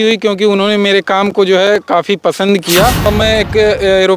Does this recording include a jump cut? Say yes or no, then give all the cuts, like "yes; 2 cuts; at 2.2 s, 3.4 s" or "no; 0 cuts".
yes; 1 cut; at 3.1 s